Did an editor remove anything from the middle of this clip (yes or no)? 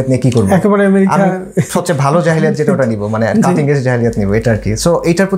no